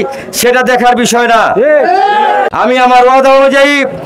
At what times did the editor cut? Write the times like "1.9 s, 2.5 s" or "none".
2.5 s